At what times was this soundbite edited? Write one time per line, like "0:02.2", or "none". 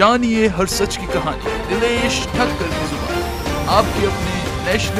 none